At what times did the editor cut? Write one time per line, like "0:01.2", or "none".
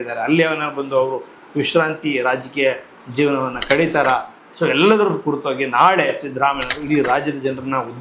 none